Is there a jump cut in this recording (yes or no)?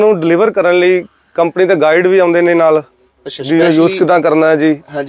no